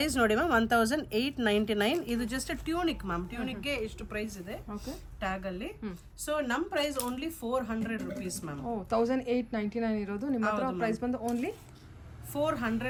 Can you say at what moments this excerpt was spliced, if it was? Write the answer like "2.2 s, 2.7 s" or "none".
none